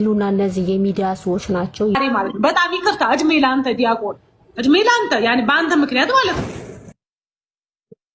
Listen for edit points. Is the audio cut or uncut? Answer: cut